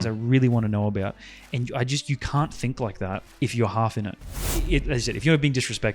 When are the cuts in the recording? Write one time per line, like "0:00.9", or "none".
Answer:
0:03.3
0:04.2